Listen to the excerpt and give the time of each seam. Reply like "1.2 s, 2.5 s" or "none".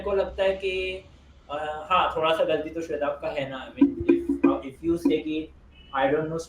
none